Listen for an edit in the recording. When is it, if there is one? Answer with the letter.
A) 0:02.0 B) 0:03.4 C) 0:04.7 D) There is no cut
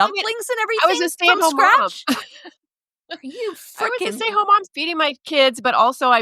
C